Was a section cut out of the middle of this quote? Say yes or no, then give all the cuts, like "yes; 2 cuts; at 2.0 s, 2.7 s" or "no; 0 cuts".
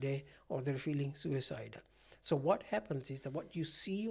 no; 0 cuts